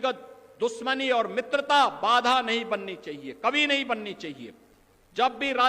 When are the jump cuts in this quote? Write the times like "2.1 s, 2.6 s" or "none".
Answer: none